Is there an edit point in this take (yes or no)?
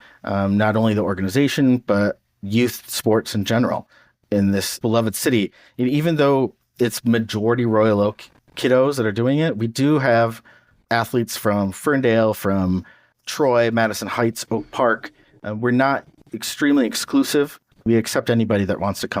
yes